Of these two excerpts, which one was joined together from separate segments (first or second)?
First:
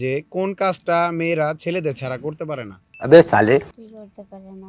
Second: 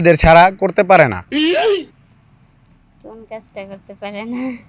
second